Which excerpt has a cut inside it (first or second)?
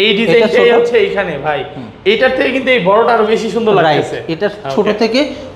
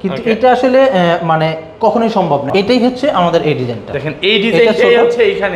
second